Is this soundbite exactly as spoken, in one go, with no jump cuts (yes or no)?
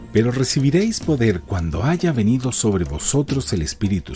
yes